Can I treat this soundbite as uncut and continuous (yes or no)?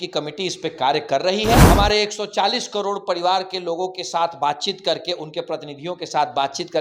no